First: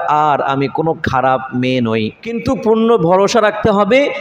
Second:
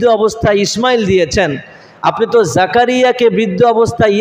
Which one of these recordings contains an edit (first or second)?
first